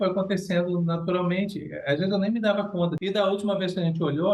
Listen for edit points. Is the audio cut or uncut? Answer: cut